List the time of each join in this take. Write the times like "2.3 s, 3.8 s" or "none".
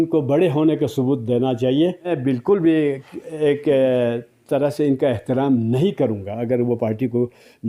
2.1 s

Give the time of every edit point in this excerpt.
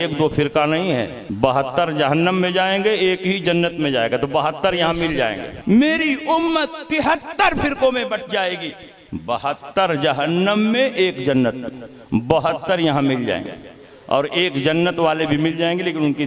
1.2 s, 5.5 s

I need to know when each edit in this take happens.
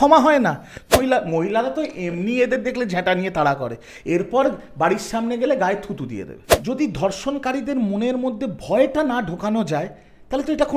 1.0 s, 6.5 s

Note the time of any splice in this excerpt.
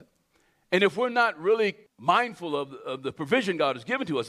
1.9 s

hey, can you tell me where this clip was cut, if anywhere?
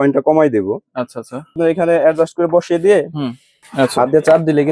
1.6 s, 3.7 s

